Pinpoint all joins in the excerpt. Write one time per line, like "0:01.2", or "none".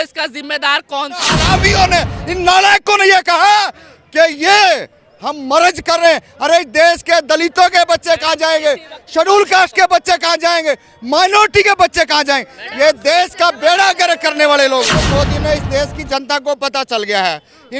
0:01.3
0:14.9